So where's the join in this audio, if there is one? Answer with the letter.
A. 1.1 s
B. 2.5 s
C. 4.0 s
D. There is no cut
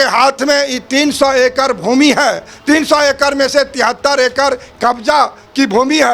D